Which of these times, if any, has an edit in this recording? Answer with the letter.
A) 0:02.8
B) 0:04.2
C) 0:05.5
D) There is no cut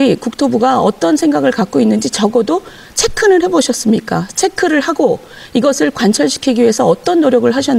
D